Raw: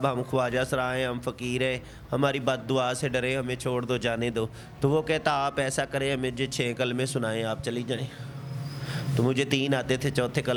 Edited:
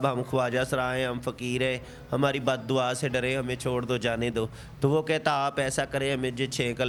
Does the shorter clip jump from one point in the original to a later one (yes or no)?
no